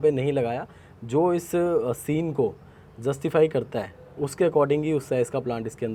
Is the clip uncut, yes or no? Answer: yes